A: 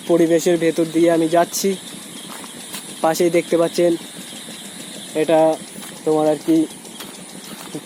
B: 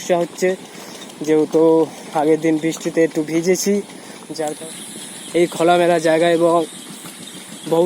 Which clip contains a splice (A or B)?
B